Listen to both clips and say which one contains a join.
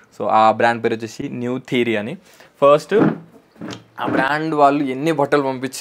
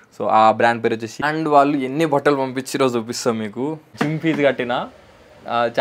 second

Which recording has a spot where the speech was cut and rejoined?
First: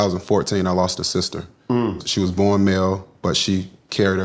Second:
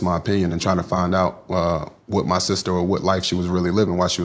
first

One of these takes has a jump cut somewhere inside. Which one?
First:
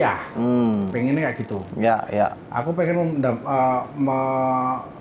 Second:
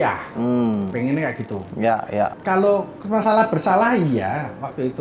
second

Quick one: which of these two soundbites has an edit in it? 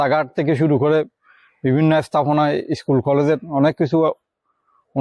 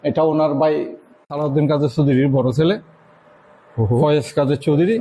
second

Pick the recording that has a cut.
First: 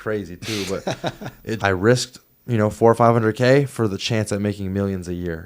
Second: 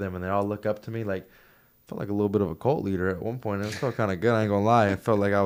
first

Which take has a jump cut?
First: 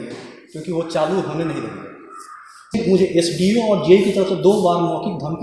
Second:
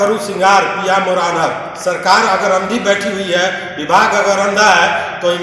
first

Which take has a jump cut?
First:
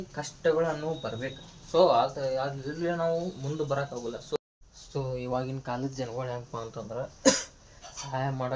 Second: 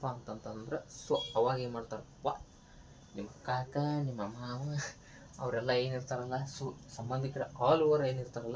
first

